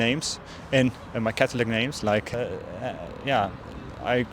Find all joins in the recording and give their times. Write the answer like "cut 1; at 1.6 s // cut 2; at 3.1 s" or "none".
cut 1; at 2.3 s